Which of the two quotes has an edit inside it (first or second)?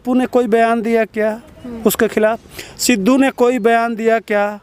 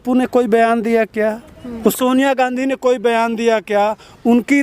second